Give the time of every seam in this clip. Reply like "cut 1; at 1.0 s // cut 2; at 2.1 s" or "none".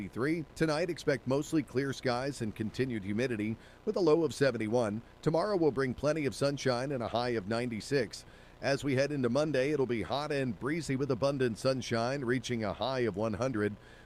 none